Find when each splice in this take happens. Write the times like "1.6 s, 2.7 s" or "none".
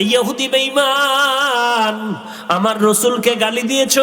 2.3 s